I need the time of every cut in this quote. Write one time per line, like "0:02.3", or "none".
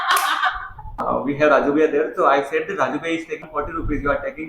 0:01.0
0:03.5